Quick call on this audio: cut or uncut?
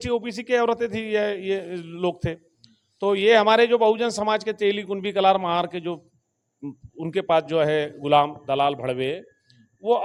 uncut